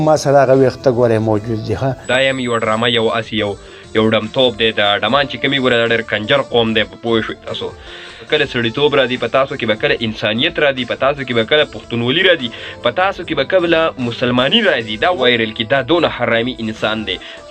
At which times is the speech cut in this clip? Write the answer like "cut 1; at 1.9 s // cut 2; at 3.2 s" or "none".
cut 1; at 2.0 s // cut 2; at 8.3 s // cut 3; at 15.2 s